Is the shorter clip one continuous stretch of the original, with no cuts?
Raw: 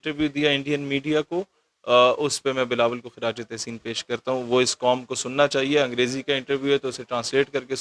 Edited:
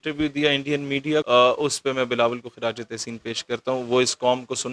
no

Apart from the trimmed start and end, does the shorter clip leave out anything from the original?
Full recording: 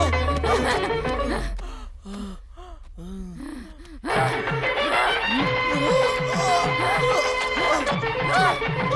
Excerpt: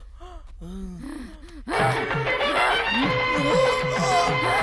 no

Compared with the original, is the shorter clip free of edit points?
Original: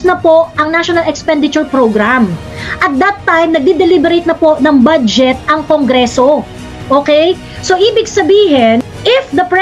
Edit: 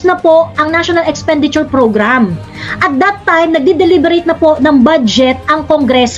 yes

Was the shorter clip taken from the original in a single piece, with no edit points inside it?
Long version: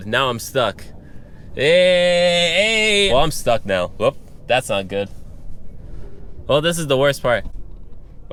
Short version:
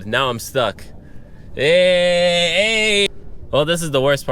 no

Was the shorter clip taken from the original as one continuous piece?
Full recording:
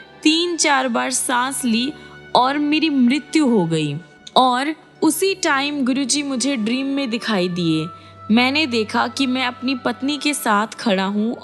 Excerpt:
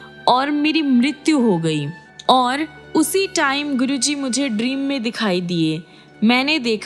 yes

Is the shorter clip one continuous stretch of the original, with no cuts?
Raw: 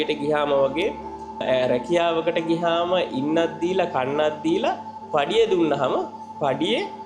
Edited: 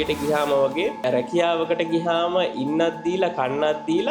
no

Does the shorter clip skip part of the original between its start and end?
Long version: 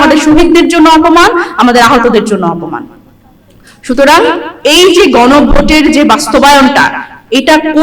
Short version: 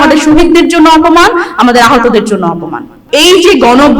yes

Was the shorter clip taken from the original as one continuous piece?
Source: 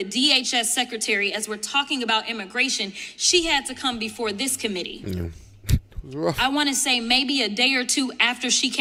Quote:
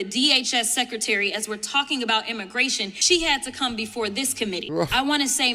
no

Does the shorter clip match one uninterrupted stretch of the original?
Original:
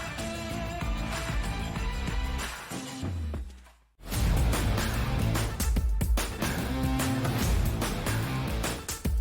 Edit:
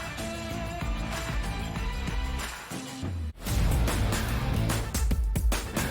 no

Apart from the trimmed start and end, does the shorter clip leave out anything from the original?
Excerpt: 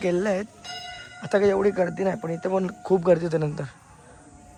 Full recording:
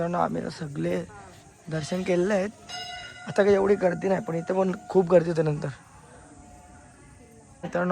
no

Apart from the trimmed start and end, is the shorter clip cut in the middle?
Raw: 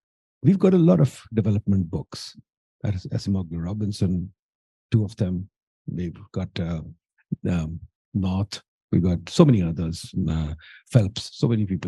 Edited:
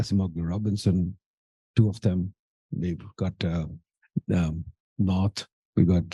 no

